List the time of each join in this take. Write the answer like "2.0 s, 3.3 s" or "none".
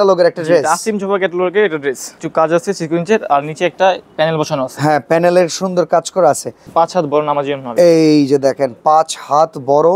2.1 s, 6.6 s